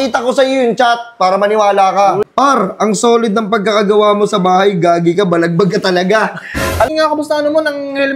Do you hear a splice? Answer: yes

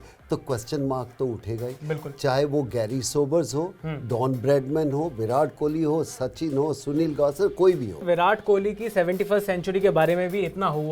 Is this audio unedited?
no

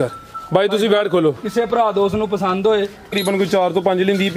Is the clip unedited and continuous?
no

